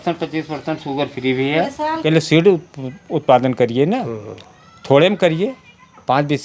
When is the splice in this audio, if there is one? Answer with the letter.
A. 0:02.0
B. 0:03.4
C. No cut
A